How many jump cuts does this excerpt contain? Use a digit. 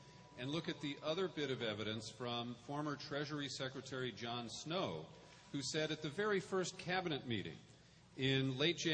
1